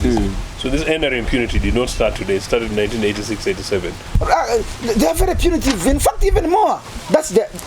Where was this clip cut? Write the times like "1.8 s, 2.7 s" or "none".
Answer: 4.0 s